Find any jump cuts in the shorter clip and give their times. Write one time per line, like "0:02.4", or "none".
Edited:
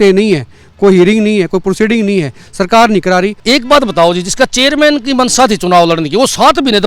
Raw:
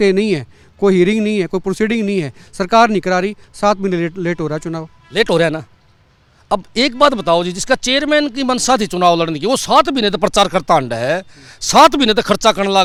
0:03.4